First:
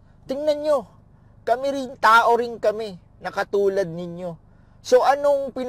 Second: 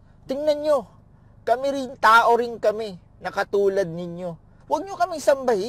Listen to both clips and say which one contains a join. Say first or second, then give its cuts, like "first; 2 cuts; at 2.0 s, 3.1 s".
second; 1 cut; at 4.5 s